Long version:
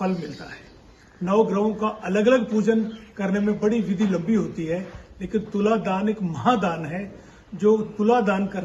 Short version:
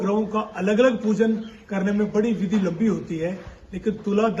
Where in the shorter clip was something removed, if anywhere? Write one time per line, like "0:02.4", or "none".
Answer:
none